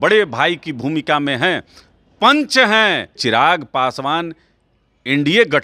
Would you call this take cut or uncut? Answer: cut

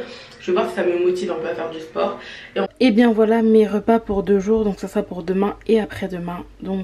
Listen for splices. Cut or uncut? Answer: cut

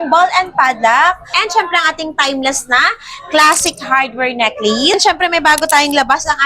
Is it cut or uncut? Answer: cut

